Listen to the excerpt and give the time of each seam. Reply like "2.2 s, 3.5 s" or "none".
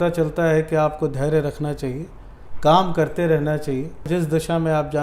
4.1 s